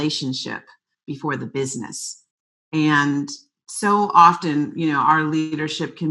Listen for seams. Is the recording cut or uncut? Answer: uncut